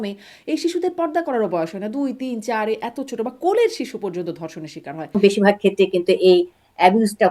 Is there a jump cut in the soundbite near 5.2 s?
yes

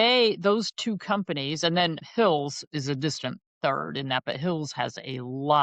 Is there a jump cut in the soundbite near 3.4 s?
no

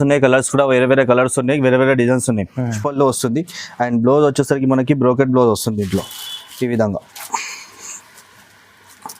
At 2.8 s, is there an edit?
yes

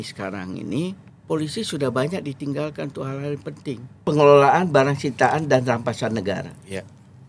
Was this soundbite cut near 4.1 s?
yes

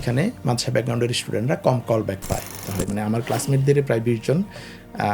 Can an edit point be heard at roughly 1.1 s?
no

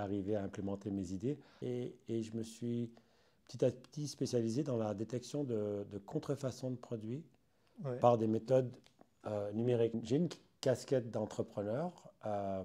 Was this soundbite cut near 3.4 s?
no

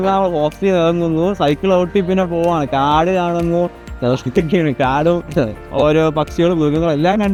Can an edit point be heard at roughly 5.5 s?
no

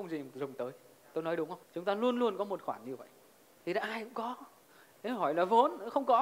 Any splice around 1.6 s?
yes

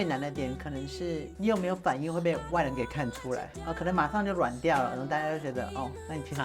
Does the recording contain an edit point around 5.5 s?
no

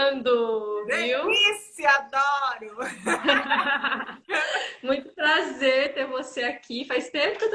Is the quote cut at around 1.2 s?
yes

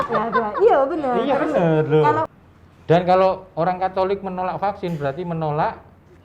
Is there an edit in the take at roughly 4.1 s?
no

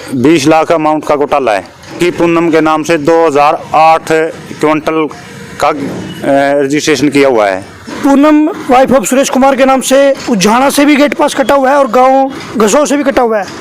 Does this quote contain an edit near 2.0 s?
yes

